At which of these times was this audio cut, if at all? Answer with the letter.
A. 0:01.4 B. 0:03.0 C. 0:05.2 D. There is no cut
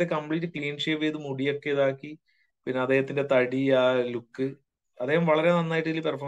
D